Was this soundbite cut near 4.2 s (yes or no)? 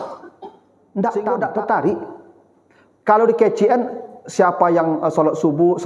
no